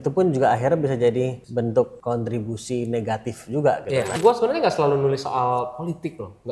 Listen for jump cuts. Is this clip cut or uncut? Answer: cut